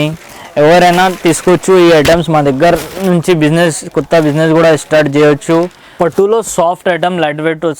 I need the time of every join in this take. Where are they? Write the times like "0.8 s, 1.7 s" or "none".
5.8 s